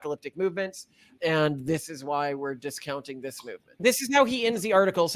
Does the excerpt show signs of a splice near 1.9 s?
no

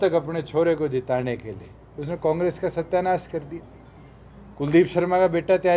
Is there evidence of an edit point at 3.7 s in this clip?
no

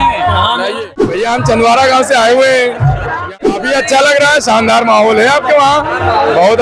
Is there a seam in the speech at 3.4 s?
yes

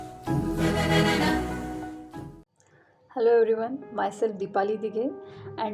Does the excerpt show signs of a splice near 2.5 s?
yes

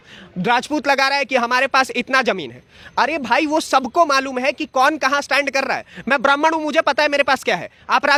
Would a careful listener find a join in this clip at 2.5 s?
no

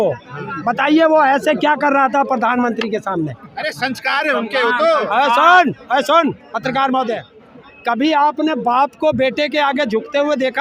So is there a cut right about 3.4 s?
no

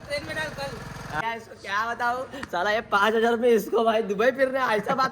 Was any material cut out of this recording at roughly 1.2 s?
yes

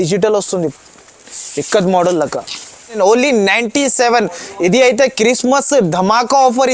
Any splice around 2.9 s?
yes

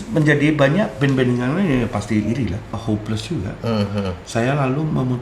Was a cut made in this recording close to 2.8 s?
yes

